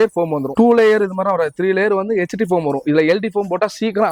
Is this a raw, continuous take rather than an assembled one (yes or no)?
yes